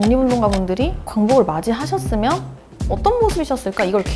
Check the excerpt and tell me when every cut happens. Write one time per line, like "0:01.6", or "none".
0:01.0